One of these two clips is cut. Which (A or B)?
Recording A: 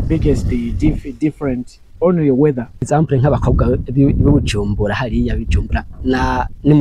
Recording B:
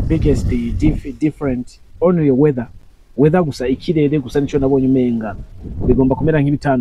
A